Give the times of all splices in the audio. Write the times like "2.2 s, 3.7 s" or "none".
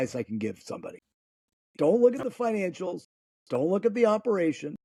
none